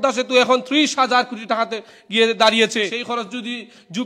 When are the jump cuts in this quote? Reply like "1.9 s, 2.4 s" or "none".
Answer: 3.0 s